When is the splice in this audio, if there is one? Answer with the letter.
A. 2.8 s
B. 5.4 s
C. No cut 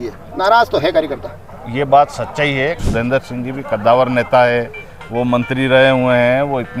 A